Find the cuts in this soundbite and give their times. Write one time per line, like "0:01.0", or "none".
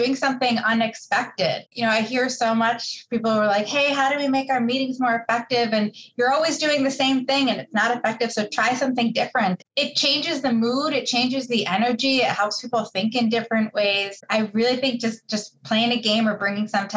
0:01.7
0:09.6
0:14.2